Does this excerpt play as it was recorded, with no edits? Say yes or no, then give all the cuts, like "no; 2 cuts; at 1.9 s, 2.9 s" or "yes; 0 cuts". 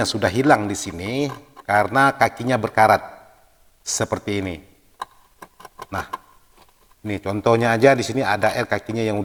yes; 0 cuts